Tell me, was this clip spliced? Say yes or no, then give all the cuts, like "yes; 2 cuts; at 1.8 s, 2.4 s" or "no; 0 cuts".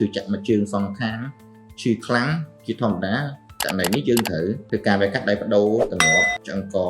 yes; 1 cut; at 4.6 s